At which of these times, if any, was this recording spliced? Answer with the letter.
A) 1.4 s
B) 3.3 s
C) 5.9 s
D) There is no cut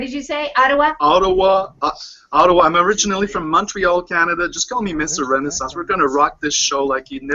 A